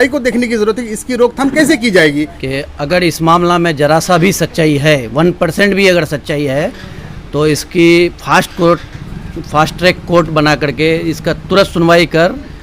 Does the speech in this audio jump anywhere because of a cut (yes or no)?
yes